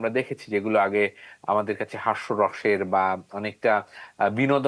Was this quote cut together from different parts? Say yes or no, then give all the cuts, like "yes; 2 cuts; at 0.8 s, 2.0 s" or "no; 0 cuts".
no; 0 cuts